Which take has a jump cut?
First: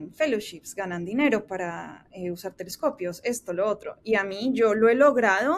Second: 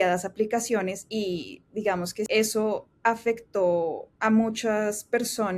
second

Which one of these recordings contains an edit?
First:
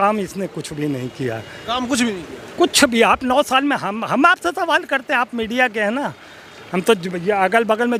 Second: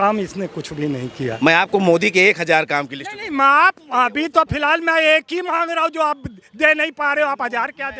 second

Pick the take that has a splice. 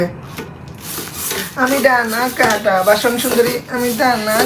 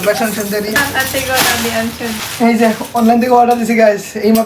second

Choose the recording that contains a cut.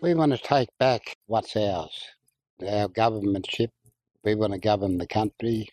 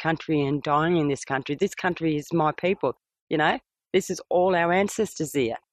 first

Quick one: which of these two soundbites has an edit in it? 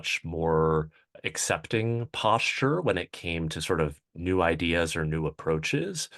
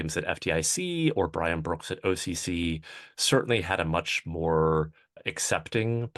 first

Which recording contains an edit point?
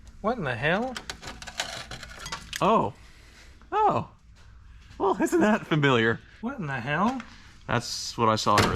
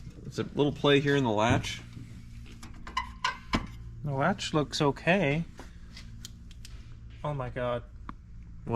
first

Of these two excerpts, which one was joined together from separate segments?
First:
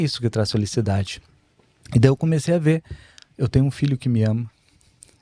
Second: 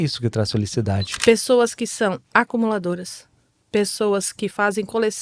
second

